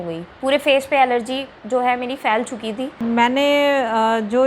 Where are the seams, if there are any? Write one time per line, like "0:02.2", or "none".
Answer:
0:02.9